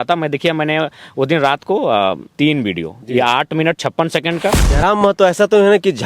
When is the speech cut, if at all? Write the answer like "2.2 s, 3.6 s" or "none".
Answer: 2.3 s, 4.6 s

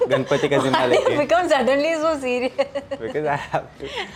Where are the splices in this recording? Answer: none

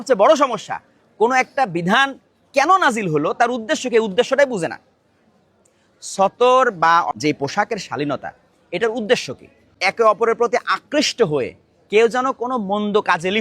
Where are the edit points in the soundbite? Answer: 7.1 s

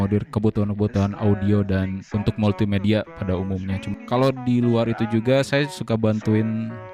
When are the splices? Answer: 3.8 s

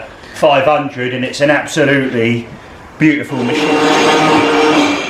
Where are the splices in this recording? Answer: 3.5 s

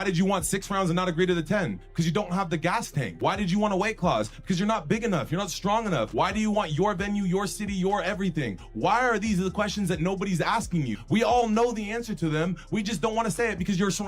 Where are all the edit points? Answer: 3.1 s, 6.1 s, 11.0 s

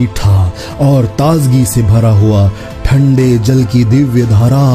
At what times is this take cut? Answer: none

